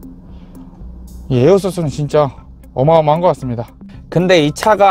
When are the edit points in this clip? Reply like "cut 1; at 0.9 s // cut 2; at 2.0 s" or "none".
cut 1; at 4.0 s